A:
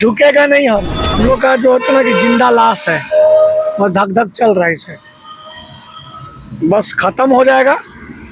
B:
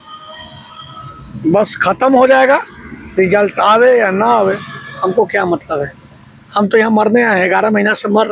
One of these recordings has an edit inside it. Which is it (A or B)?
A